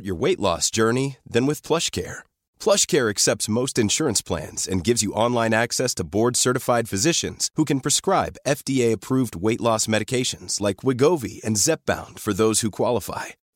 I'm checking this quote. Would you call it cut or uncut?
uncut